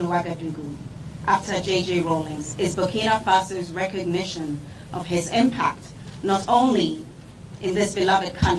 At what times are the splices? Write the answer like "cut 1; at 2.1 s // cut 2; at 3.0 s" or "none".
none